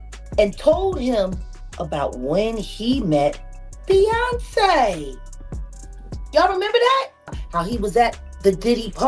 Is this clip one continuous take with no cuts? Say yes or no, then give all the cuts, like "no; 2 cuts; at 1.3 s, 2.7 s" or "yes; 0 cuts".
no; 1 cut; at 7.4 s